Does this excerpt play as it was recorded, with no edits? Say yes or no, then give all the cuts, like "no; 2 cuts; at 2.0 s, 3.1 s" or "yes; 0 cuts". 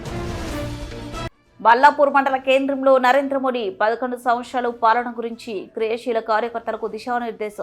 no; 1 cut; at 1.3 s